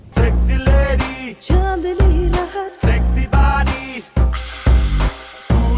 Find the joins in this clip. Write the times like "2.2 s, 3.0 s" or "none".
none